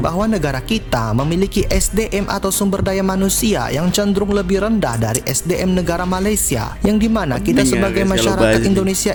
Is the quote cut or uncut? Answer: uncut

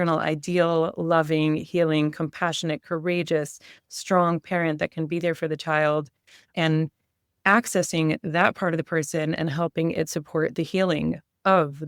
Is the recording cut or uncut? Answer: uncut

